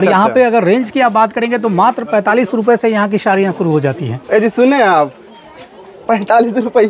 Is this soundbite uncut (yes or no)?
yes